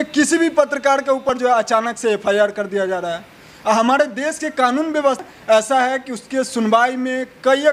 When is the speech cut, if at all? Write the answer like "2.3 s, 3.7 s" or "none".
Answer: 1.3 s, 5.2 s